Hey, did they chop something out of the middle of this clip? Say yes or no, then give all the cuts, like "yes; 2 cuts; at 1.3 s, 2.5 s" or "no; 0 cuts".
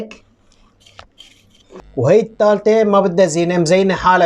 yes; 1 cut; at 1.9 s